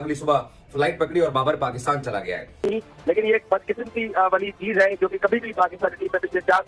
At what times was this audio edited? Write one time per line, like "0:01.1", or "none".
0:02.5